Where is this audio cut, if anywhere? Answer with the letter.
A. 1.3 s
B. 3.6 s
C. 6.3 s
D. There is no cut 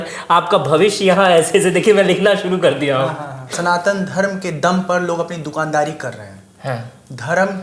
B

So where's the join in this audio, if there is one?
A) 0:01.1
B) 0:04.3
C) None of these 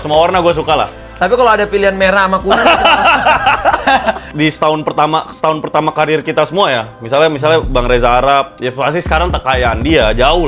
B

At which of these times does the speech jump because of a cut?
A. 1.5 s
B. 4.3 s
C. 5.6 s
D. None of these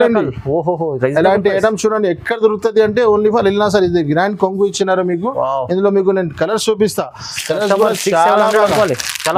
D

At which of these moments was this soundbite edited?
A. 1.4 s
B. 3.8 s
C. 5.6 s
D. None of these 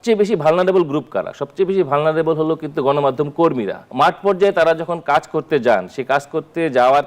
B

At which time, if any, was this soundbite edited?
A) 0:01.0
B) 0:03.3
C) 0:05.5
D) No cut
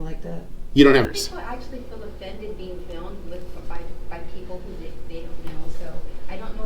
A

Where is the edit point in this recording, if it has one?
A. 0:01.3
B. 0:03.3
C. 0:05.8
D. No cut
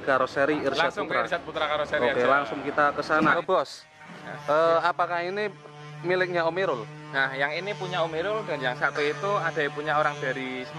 B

